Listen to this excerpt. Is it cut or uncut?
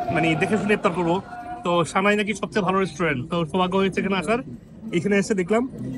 uncut